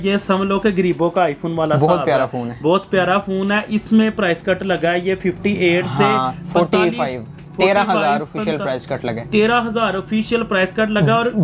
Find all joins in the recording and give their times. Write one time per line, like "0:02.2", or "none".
none